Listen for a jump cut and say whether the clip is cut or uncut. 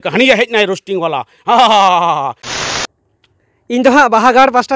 cut